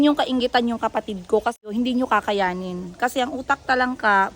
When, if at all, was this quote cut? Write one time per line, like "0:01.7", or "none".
0:01.7